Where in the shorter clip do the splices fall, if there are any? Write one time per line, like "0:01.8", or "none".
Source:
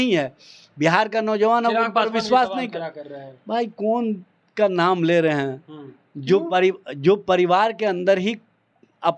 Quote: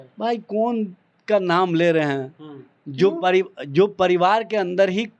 none